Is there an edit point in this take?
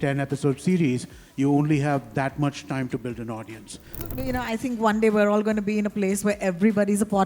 yes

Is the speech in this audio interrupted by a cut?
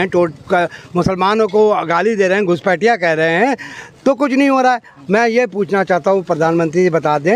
no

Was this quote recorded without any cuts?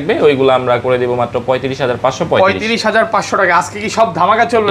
yes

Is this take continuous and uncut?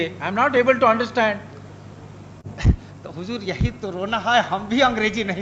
yes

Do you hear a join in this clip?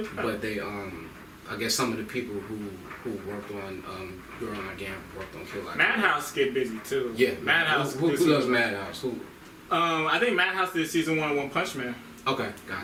no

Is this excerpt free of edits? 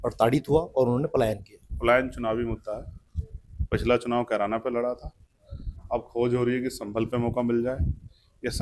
yes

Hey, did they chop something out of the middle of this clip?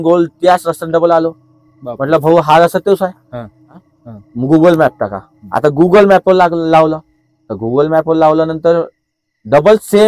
yes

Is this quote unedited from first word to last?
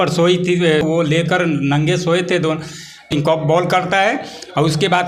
no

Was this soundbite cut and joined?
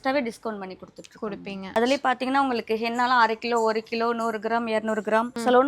yes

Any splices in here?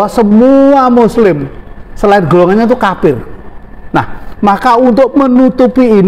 no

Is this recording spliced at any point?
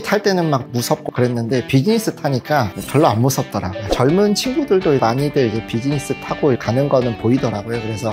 yes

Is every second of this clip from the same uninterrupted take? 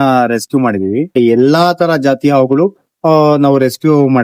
no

